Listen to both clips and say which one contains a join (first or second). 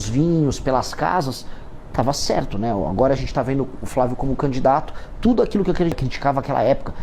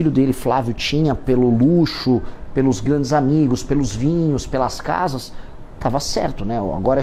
first